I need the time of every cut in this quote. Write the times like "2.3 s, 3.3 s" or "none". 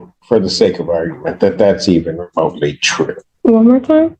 3.3 s